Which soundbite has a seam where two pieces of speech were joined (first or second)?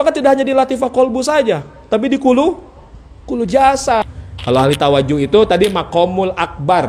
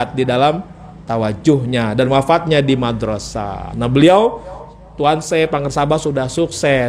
first